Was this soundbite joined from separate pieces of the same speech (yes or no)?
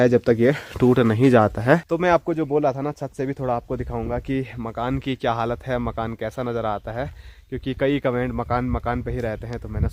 no